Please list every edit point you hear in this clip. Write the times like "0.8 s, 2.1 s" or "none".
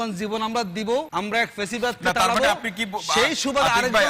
1.1 s